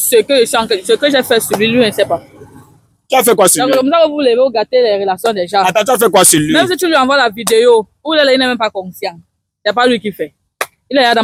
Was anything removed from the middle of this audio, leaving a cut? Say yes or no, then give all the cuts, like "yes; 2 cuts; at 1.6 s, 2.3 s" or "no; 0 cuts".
no; 0 cuts